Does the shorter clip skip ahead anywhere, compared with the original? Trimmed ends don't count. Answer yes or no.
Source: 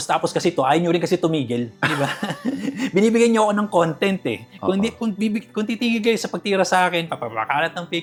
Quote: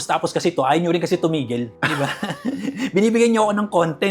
no